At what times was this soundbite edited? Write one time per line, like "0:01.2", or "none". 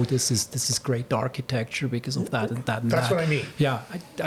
none